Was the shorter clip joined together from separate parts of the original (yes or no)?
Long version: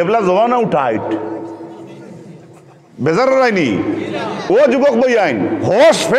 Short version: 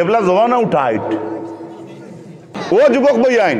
yes